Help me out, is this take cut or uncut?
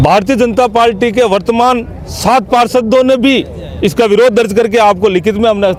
uncut